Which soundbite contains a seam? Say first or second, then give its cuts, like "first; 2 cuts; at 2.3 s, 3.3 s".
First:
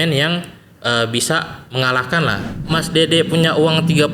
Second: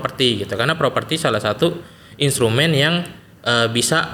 first; 1 cut; at 2.5 s